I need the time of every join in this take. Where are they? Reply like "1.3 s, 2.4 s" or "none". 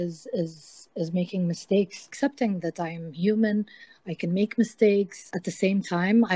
2.0 s